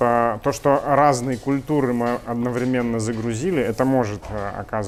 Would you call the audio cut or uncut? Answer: uncut